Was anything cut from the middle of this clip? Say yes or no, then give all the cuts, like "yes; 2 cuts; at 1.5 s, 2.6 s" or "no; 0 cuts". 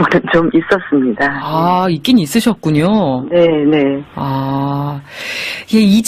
yes; 1 cut; at 3.7 s